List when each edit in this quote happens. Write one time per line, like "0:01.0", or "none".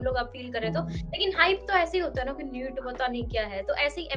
none